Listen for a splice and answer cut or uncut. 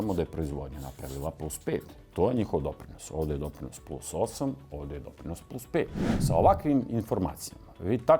cut